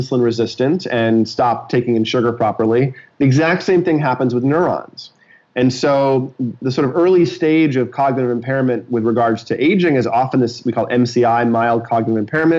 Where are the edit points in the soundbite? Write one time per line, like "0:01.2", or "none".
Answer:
none